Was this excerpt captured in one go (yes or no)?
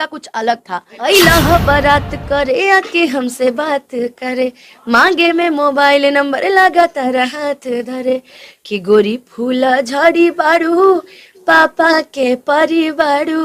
no